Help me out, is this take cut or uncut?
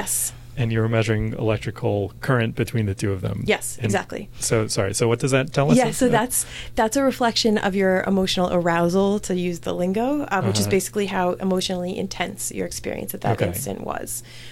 uncut